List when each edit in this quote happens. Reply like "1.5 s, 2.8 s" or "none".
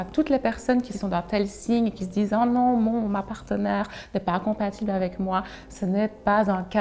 0.9 s